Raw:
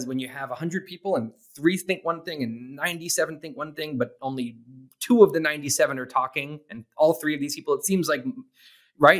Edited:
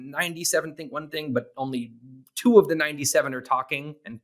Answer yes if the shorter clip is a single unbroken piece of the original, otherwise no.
yes